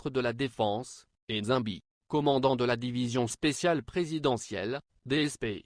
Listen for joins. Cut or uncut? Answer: cut